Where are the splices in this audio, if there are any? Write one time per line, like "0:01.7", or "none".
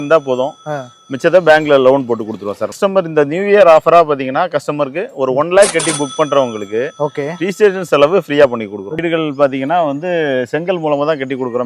0:02.8
0:09.0